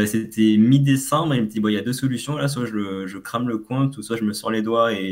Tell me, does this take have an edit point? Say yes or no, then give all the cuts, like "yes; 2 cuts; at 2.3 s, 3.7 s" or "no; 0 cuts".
no; 0 cuts